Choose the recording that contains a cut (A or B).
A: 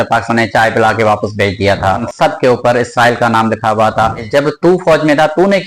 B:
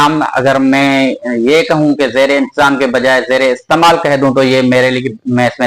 A